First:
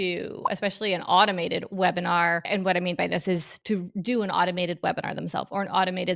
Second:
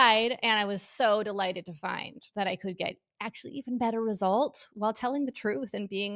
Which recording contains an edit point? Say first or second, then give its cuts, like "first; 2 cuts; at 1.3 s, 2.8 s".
first; 2 cuts; at 2.4 s, 3.5 s